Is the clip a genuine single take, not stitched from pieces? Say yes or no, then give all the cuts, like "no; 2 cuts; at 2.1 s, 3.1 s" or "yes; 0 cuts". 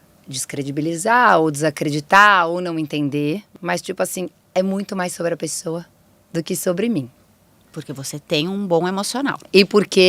no; 1 cut; at 3.5 s